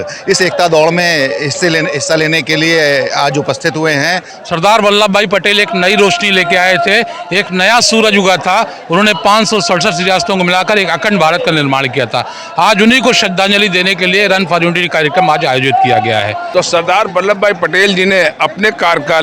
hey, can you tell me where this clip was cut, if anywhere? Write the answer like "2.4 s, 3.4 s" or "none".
4.3 s, 16.4 s